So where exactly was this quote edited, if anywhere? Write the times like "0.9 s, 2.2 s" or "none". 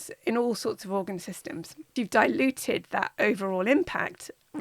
1.9 s